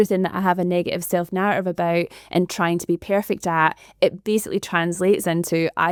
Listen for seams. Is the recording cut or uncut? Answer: uncut